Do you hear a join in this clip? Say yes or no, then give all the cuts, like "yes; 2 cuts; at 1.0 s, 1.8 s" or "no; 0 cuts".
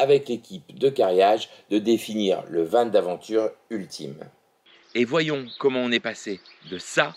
yes; 1 cut; at 4.6 s